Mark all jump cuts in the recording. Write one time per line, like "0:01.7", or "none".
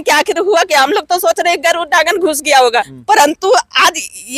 0:02.9